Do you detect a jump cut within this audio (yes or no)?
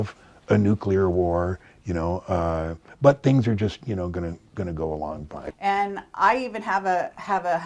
yes